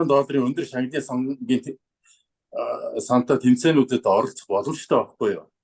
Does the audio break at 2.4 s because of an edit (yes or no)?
no